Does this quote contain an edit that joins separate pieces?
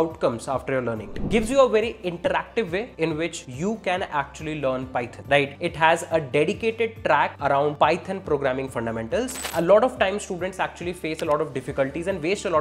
yes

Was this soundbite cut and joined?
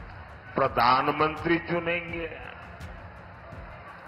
no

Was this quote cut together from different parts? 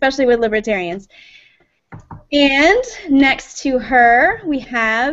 yes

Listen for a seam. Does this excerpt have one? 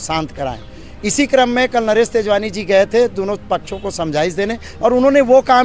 no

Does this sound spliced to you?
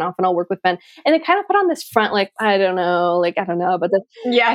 no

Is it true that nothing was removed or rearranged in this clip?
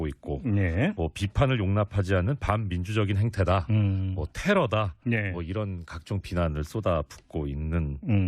no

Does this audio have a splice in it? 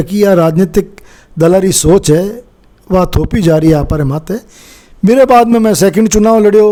no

